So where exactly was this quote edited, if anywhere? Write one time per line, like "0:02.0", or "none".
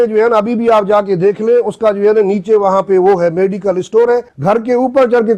0:04.3